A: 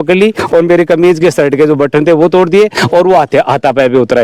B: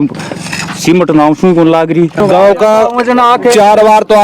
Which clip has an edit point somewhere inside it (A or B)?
B